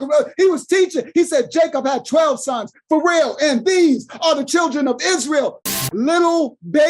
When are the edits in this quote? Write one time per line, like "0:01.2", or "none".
0:05.7